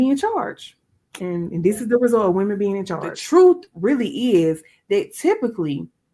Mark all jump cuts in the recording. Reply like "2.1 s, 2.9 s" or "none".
3.1 s